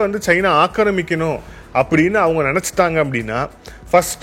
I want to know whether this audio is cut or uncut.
uncut